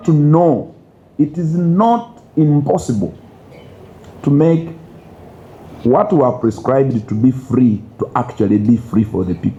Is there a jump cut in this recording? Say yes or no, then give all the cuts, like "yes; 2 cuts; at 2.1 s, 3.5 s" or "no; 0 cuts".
no; 0 cuts